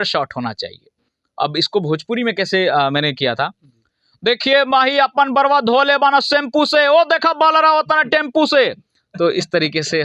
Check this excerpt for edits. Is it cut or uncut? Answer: uncut